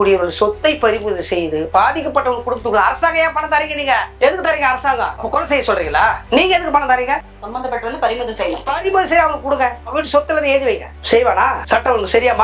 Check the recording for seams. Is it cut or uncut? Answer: uncut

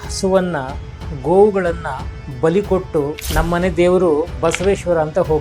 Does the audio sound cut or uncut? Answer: cut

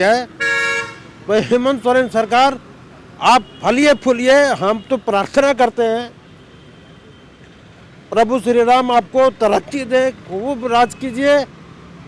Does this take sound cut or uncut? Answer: uncut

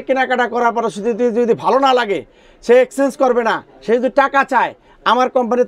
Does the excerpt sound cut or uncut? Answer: uncut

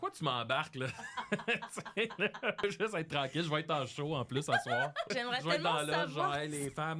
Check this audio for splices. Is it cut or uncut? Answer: cut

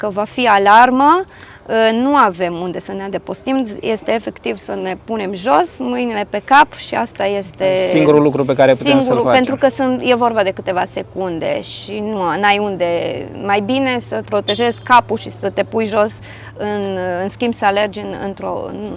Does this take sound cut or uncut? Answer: uncut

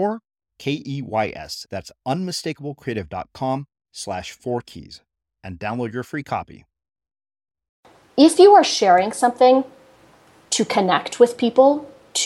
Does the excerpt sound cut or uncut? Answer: cut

